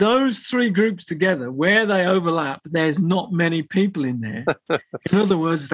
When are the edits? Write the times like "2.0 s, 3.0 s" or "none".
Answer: none